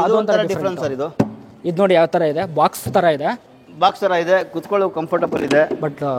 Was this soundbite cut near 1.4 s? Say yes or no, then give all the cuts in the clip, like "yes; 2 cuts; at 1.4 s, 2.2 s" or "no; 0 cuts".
no; 0 cuts